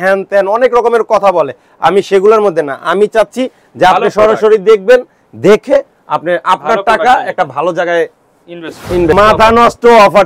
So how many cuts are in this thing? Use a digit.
1